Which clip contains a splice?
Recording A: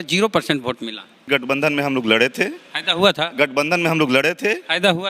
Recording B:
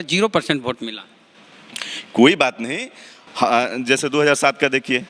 A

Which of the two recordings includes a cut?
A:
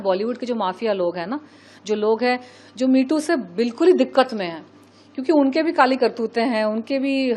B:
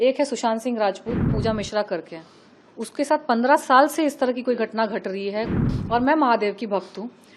B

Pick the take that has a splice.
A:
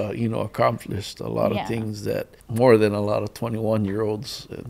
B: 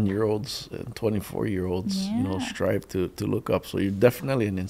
A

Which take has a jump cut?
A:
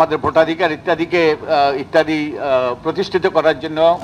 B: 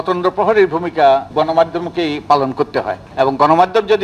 B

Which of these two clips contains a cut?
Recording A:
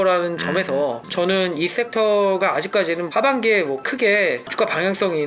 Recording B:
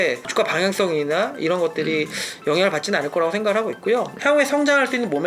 B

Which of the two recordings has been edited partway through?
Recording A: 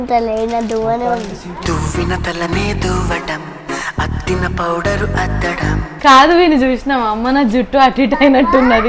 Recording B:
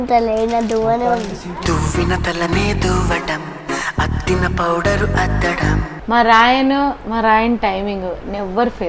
B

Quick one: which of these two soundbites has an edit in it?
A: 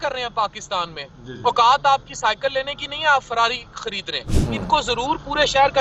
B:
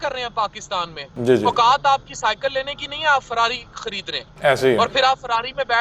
A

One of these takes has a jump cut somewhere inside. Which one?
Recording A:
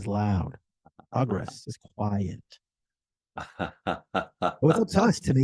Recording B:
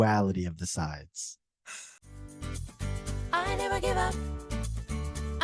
B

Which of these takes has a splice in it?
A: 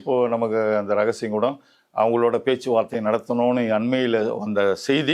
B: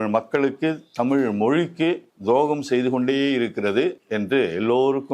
B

